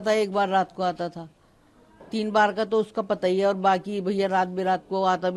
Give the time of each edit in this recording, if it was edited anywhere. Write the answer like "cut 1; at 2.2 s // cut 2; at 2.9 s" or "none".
none